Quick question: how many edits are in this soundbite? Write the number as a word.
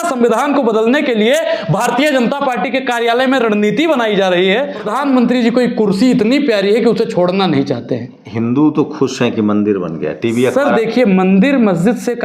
two